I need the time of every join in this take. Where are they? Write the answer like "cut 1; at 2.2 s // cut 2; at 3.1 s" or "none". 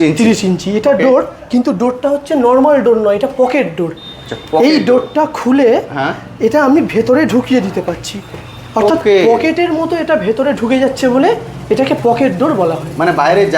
none